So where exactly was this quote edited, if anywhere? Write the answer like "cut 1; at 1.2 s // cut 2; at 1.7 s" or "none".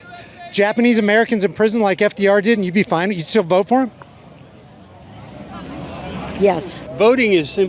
cut 1; at 6.8 s